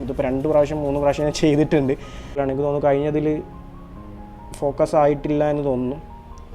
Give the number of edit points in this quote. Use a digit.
1